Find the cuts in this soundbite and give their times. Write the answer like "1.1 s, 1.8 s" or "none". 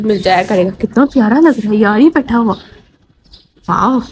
none